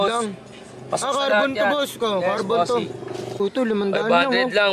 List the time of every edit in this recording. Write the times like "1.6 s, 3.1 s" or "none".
3.4 s